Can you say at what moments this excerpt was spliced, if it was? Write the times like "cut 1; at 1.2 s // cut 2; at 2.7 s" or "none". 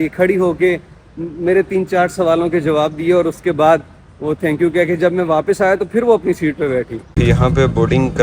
cut 1; at 7.0 s